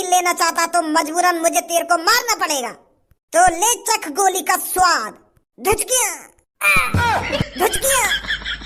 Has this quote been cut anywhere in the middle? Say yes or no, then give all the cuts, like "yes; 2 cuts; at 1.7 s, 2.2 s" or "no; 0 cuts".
no; 0 cuts